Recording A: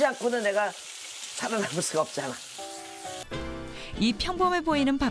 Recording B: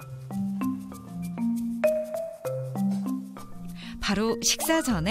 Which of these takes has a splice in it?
A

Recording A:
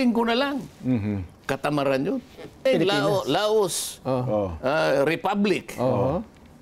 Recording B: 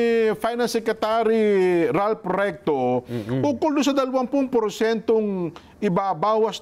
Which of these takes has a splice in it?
A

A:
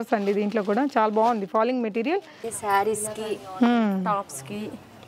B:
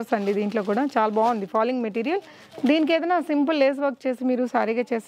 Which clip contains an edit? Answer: A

